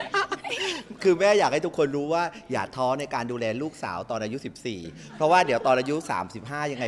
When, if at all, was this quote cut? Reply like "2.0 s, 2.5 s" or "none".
none